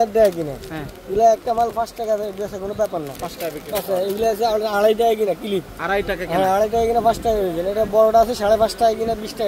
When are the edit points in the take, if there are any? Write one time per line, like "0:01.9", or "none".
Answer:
none